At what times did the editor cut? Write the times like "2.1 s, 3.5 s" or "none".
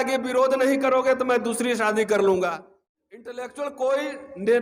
3.4 s